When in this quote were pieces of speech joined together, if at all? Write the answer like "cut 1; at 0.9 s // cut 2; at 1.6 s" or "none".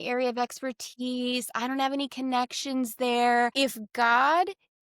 cut 1; at 3.5 s